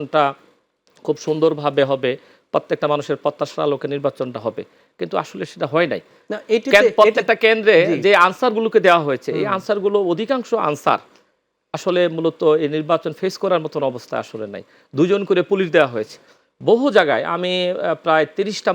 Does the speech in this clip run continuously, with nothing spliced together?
yes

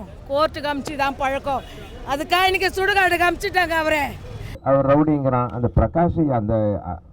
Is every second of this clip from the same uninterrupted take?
no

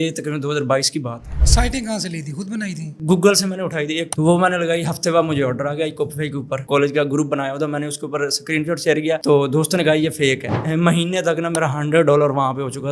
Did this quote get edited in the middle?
yes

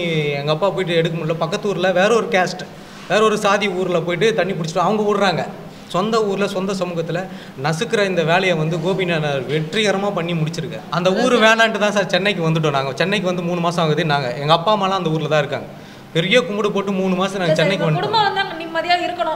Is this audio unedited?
no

